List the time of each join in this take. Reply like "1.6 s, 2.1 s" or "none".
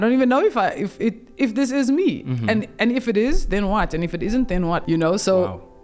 4.8 s